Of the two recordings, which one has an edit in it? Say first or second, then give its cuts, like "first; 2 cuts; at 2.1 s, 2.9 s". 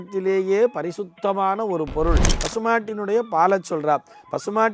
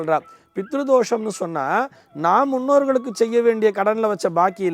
first; 1 cut; at 2.3 s